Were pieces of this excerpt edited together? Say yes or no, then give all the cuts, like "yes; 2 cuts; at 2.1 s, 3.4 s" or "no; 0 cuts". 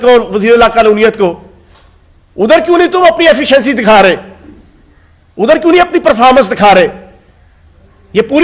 no; 0 cuts